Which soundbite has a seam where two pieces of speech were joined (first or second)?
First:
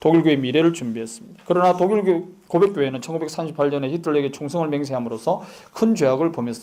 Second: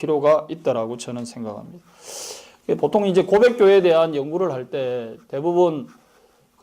second